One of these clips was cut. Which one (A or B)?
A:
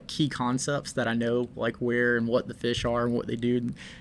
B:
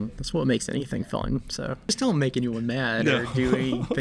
B